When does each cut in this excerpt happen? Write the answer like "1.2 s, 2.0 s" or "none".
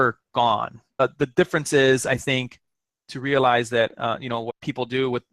1.0 s, 4.5 s